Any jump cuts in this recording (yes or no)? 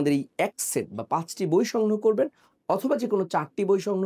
no